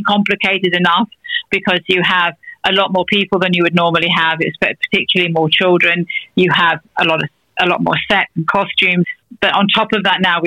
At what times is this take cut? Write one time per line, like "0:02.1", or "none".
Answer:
0:09.1